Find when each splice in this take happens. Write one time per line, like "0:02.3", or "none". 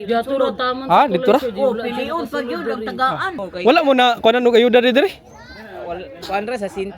0:03.3

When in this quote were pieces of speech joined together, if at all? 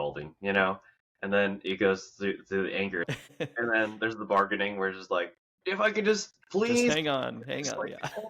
0:03.1

